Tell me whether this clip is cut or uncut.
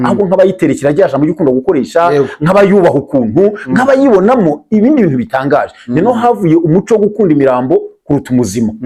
uncut